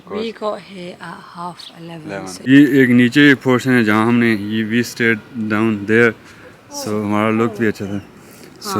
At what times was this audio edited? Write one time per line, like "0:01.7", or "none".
0:02.5